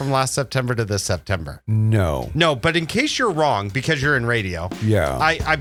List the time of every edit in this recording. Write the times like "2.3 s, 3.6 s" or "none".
none